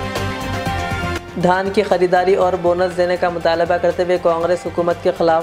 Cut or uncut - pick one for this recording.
cut